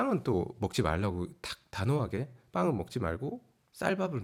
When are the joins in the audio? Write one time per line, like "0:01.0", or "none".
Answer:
none